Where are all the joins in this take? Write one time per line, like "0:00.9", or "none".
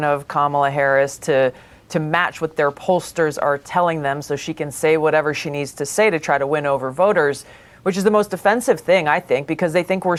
none